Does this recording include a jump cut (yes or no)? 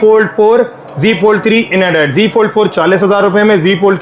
no